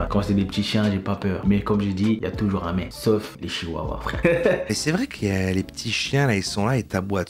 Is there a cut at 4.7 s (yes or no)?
yes